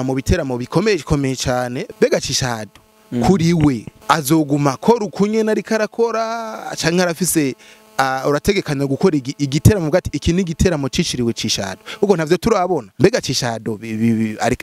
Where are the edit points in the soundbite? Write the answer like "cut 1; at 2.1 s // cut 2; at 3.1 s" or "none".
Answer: cut 1; at 1.8 s // cut 2; at 3.9 s // cut 3; at 12.9 s